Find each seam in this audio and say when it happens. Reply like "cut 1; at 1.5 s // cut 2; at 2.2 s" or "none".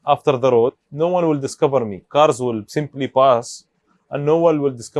cut 1; at 0.8 s // cut 2; at 2.0 s

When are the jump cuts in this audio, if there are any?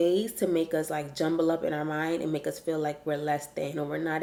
none

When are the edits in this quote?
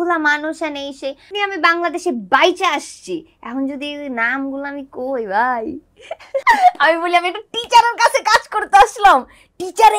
cut 1; at 1.3 s // cut 2; at 6.4 s

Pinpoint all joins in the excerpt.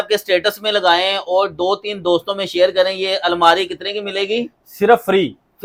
none

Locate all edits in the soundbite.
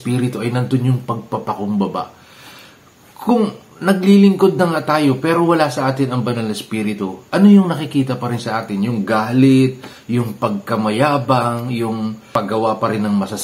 cut 1; at 12.2 s

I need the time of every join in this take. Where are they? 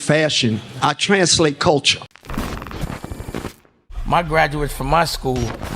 cut 1; at 2.2 s

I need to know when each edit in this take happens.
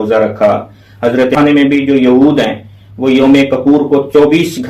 cut 1; at 1.4 s

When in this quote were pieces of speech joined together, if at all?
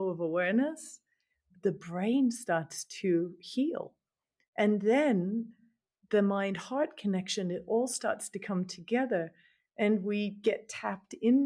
cut 1; at 1.5 s

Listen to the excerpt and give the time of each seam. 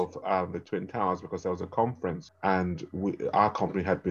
cut 1; at 2.3 s

